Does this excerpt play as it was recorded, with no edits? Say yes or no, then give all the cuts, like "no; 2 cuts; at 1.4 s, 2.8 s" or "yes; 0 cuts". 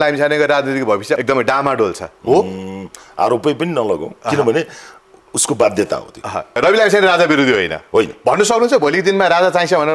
no; 2 cuts; at 2.1 s, 6.6 s